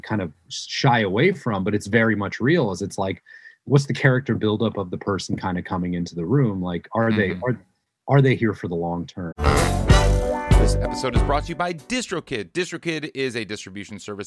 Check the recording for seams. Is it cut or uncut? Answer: cut